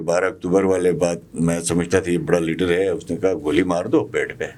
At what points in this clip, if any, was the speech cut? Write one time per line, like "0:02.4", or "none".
none